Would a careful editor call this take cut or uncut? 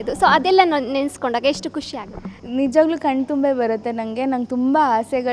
uncut